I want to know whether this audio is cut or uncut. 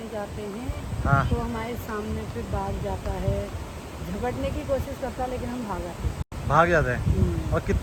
uncut